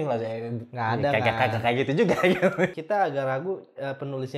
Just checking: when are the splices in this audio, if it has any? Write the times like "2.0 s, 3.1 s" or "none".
2.8 s

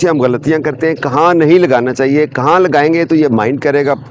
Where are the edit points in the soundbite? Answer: none

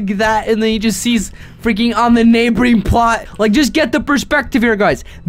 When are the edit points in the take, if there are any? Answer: 3.3 s

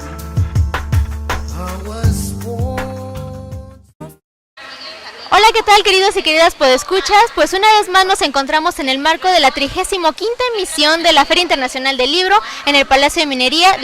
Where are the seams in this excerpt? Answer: 1.2 s

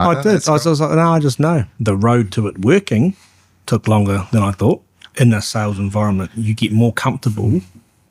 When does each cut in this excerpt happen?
1.7 s, 5.0 s

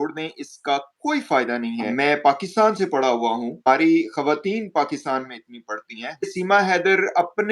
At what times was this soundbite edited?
1.8 s, 3.6 s, 6.2 s

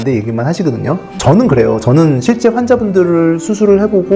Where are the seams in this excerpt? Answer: none

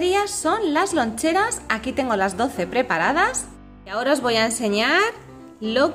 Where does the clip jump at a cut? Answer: 3.5 s

